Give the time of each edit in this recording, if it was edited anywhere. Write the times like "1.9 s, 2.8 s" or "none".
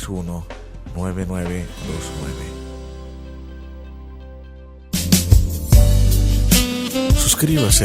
4.4 s